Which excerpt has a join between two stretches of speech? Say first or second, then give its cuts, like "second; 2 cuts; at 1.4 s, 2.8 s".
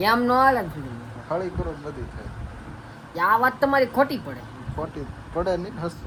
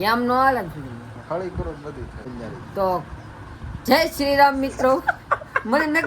second; 1 cut; at 2.3 s